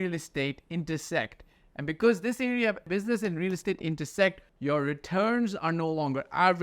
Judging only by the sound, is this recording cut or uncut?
cut